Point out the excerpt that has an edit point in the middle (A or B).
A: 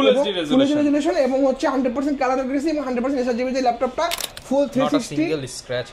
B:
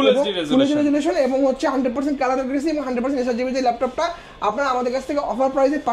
A